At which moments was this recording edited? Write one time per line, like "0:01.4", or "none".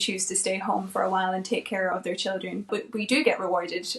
0:02.7